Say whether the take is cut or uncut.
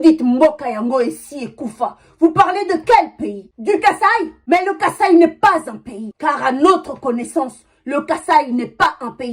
uncut